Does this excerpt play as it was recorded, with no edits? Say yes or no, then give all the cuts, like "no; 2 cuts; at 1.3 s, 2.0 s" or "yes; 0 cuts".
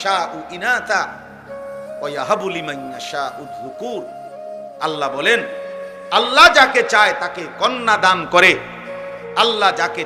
yes; 0 cuts